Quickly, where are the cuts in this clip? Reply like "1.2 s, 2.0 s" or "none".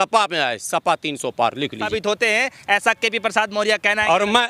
1.8 s